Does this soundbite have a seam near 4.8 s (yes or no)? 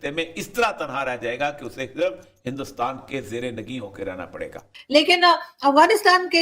yes